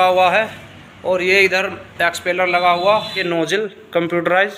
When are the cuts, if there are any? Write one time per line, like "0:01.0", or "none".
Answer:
0:03.2